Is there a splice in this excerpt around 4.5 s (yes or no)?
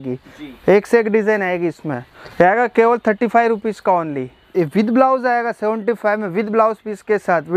yes